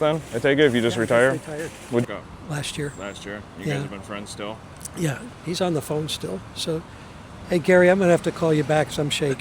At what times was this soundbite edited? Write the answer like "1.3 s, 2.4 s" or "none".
2.0 s